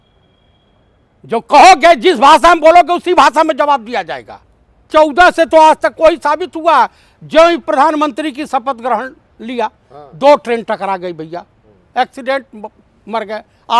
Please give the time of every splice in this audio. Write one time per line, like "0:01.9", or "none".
0:04.9